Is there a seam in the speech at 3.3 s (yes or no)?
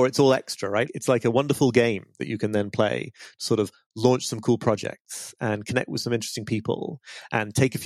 no